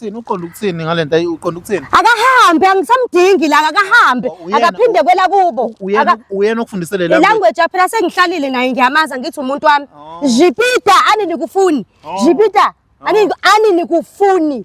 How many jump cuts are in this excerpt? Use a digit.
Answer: 0